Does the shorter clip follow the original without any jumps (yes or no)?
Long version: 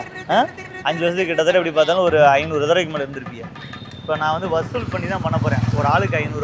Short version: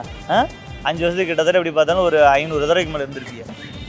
yes